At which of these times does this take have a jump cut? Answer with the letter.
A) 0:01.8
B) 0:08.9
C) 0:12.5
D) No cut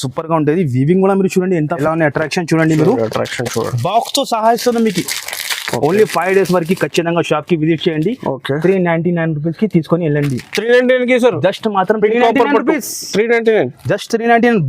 A